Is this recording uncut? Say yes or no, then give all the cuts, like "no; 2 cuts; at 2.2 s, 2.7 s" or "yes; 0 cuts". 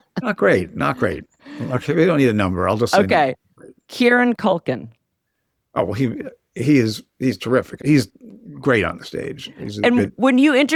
yes; 0 cuts